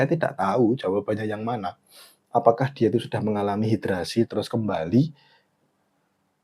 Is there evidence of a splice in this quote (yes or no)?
no